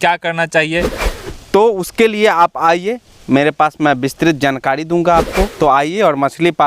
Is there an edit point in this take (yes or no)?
yes